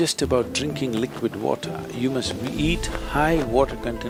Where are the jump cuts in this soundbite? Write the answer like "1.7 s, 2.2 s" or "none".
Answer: none